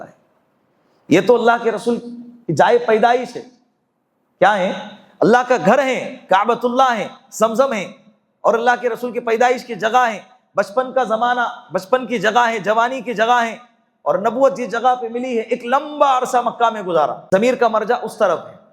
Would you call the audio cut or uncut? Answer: cut